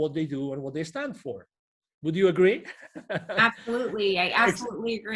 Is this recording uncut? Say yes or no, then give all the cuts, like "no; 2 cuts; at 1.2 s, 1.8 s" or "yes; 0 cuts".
yes; 0 cuts